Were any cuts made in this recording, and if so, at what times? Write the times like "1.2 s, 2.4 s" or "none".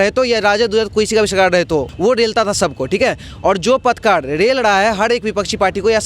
1.9 s